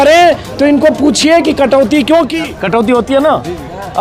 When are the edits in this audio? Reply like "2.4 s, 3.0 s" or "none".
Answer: 2.4 s